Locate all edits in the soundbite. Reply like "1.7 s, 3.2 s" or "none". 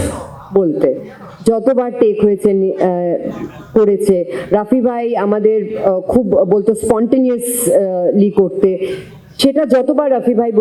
none